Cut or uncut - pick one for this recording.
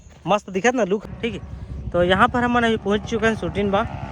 cut